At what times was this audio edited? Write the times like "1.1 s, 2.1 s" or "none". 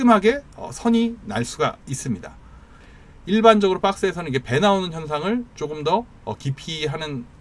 2.7 s